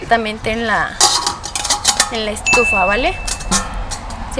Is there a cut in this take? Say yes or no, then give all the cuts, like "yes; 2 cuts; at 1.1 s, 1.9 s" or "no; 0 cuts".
no; 0 cuts